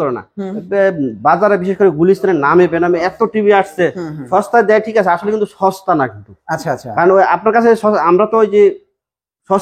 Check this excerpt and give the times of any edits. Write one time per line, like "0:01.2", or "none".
none